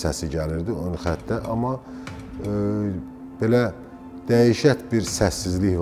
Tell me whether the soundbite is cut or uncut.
uncut